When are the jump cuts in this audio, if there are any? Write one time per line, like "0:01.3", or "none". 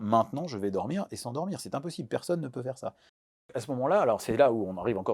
0:03.5